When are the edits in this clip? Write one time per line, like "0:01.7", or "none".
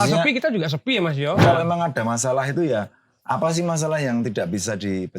0:01.4